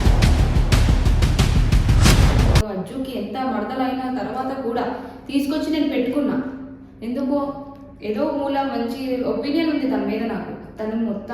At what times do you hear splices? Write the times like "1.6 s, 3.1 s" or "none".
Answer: 2.7 s